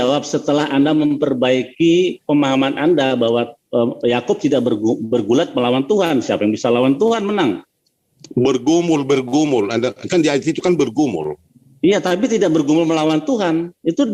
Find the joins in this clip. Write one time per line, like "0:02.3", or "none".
none